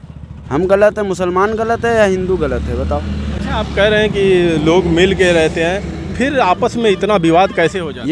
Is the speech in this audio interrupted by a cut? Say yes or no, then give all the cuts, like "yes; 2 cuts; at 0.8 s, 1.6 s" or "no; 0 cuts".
no; 0 cuts